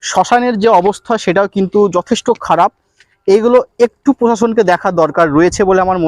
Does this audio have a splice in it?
no; 0 cuts

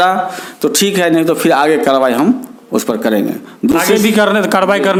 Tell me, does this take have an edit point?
no; 0 cuts

